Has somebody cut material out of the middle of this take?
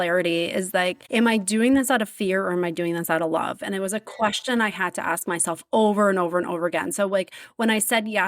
yes; 1 cut; at 1.0 s

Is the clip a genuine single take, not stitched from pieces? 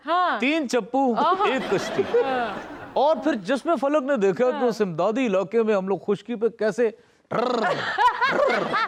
yes; 0 cuts

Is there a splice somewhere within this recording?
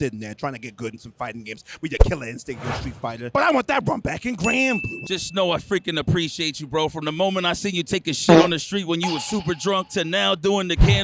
yes; 1 cut; at 4.9 s

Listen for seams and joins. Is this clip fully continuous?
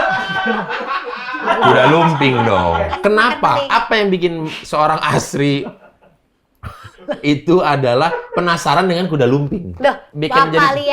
no; 2 cuts; at 2.9 s, 10.1 s

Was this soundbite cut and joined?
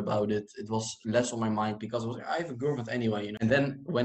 no; 0 cuts

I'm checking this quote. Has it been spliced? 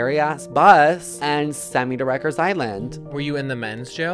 yes; 1 cut; at 1.1 s

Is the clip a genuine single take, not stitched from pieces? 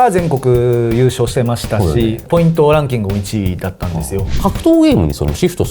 no; 2 cuts; at 2.2 s, 4.3 s

